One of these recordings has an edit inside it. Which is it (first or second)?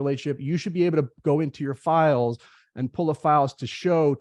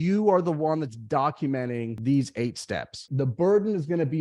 second